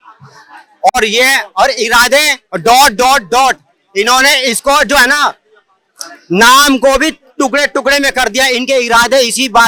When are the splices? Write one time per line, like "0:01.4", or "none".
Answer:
none